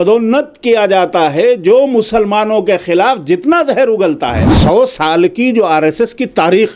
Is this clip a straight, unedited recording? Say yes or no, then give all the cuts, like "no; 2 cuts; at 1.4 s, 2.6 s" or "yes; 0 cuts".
no; 1 cut; at 4.4 s